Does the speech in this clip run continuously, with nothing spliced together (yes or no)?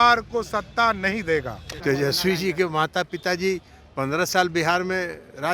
no